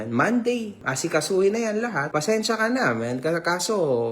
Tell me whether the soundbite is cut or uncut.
cut